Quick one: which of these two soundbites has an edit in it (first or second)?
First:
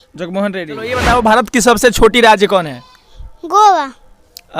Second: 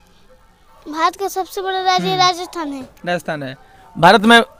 first